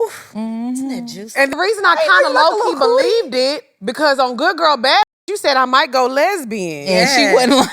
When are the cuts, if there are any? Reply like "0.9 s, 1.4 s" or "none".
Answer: 1.5 s